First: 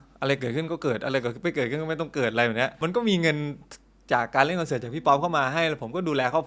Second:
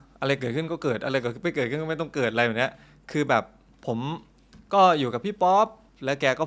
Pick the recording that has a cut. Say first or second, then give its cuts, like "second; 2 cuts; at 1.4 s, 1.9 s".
first; 1 cut; at 2.7 s